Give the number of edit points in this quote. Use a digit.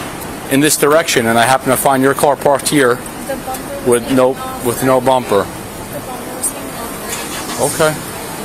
0